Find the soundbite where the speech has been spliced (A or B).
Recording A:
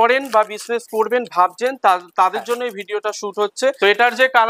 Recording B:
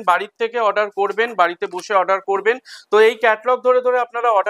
A